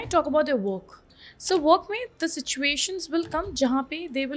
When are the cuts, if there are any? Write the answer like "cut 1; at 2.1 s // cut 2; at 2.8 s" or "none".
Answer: none